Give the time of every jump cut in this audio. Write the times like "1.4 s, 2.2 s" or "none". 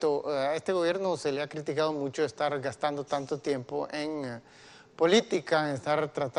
none